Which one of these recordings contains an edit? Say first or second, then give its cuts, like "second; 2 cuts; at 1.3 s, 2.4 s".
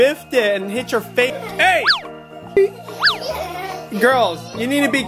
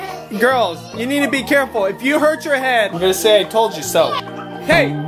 first; 2 cuts; at 1.4 s, 2.6 s